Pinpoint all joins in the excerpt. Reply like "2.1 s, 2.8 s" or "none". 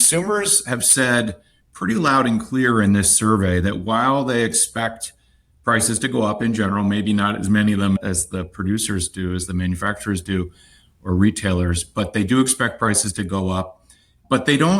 none